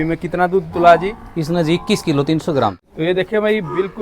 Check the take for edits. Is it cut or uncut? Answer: cut